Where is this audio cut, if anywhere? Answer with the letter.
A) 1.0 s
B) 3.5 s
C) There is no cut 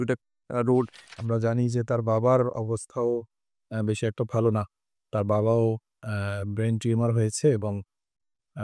A